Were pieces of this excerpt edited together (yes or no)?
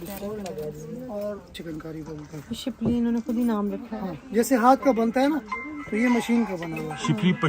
yes